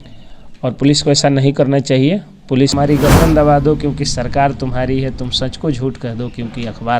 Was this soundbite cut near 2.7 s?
yes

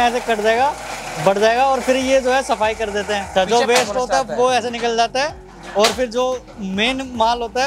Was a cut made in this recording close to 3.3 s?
yes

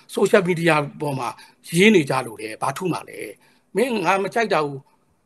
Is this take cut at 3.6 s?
yes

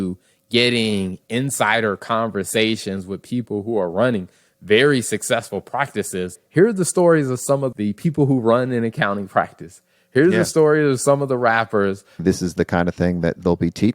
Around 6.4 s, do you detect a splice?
yes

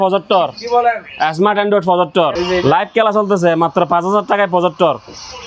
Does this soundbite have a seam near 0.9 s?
no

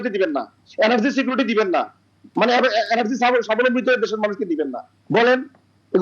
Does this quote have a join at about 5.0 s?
no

